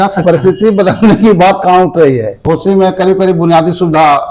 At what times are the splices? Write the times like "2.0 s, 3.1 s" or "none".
2.0 s